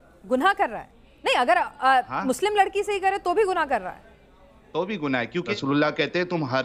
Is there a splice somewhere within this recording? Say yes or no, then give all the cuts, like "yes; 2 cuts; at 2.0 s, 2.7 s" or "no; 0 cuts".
yes; 1 cut; at 5.5 s